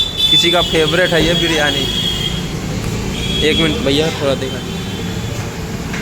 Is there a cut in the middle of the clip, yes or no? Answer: no